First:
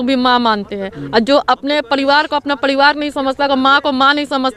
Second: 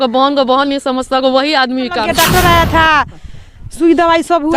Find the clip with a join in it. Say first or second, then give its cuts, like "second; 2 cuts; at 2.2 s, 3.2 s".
second; 1 cut; at 2.0 s